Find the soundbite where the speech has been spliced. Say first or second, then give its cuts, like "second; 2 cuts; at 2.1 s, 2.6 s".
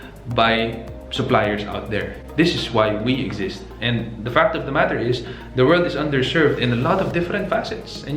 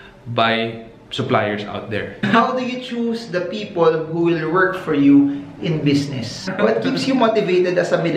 second; 2 cuts; at 2.3 s, 6.4 s